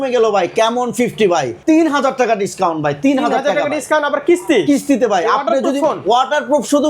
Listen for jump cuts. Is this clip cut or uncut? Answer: cut